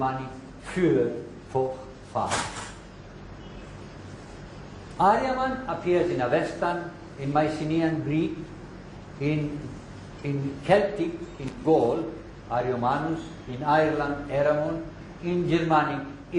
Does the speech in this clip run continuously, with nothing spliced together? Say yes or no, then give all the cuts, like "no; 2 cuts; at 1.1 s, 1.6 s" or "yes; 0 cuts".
no; 1 cut; at 12.6 s